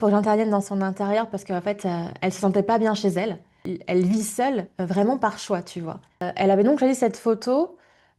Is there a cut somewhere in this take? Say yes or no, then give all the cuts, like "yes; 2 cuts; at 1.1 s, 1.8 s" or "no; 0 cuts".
yes; 2 cuts; at 3.7 s, 6.2 s